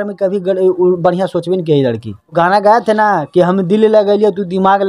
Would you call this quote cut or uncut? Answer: cut